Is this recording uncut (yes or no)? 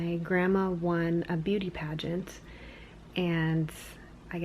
yes